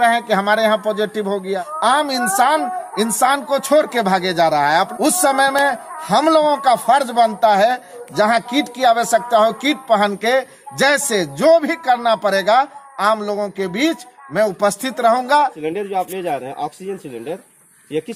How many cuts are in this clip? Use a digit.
4